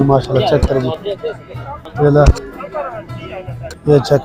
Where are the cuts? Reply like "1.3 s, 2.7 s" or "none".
none